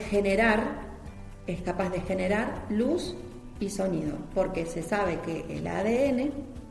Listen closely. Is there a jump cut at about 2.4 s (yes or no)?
no